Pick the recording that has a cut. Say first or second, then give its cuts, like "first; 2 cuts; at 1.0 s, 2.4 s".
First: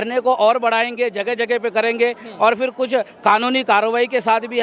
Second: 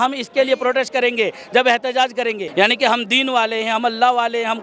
second; 1 cut; at 2.4 s